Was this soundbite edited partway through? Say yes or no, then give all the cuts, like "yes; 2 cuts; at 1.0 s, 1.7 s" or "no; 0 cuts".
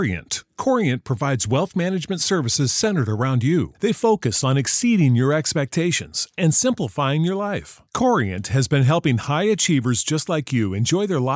no; 0 cuts